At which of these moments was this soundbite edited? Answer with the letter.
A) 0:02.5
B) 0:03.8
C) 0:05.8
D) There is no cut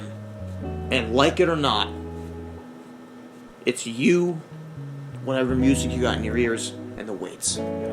D